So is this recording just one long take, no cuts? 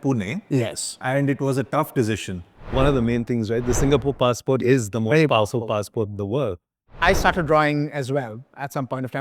no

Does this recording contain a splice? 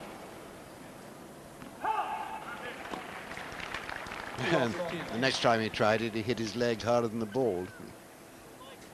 yes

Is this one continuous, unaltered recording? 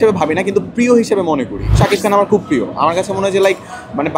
no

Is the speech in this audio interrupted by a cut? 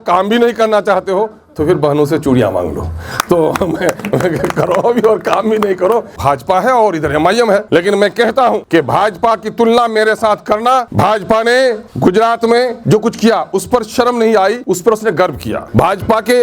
yes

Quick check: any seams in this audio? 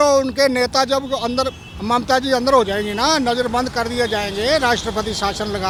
no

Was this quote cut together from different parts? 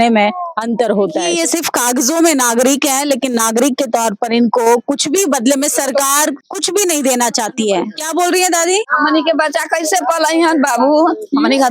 yes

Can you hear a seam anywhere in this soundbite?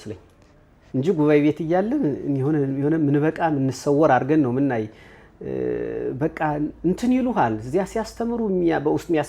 no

